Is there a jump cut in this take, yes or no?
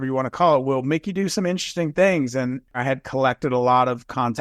yes